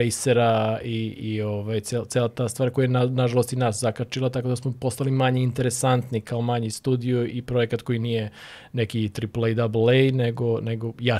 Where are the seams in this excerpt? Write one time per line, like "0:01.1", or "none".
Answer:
none